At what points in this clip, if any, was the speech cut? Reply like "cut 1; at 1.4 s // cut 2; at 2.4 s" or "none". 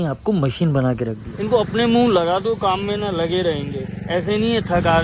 cut 1; at 1.2 s